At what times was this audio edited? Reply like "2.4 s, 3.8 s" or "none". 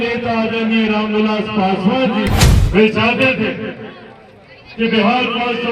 2.4 s